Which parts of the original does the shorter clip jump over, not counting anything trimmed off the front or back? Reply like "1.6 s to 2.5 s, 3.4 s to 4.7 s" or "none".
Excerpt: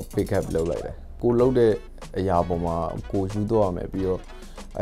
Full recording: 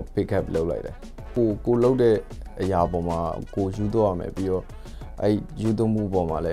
1.2 s to 1.6 s